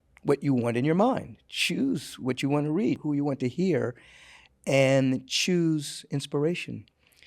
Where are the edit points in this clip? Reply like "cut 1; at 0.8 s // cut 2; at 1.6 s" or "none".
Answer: cut 1; at 3.0 s